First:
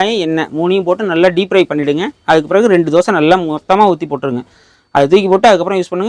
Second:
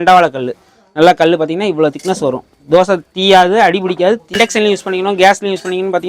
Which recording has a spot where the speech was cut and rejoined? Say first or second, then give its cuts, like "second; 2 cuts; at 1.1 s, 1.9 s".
second; 1 cut; at 4.3 s